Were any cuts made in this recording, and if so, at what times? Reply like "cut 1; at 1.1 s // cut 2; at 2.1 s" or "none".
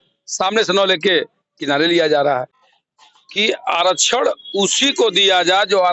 cut 1; at 2.6 s